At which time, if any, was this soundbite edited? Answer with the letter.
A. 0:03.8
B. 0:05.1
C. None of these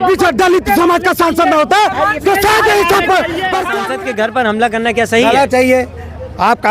A